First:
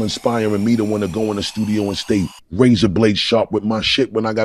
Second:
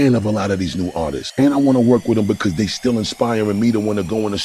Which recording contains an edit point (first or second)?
second